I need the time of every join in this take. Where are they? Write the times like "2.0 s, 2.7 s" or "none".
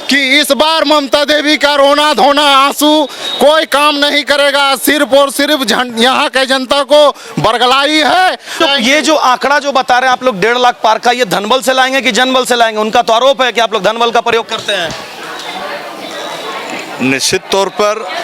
none